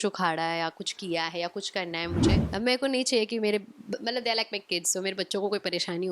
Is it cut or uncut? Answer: cut